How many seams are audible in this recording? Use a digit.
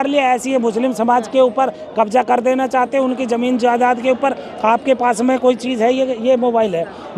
0